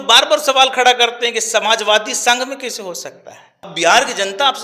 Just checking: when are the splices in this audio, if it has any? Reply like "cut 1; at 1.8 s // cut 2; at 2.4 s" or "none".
cut 1; at 3.7 s

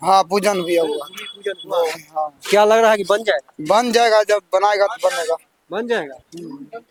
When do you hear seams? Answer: none

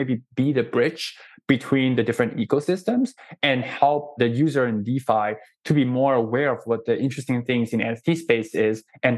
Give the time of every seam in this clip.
cut 1; at 4.1 s

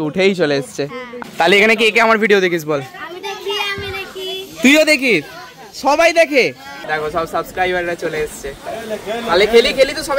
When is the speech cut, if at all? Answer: cut 1; at 1.1 s // cut 2; at 6.8 s

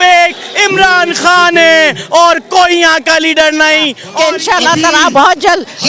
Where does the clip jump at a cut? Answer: cut 1; at 4.0 s

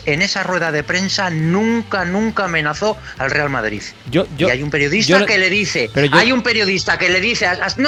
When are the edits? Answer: none

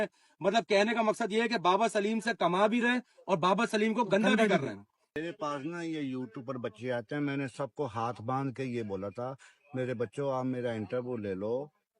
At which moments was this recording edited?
cut 1; at 5.1 s

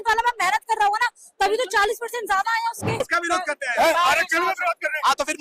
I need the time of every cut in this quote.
cut 1; at 3.1 s

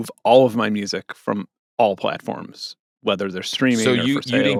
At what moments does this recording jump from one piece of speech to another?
none

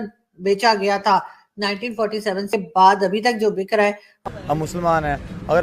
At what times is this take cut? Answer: cut 1; at 2.5 s // cut 2; at 4.2 s

